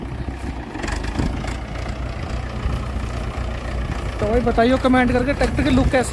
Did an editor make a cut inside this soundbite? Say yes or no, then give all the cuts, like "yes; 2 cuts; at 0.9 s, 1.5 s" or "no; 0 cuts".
no; 0 cuts